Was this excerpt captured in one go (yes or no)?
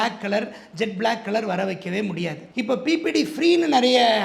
yes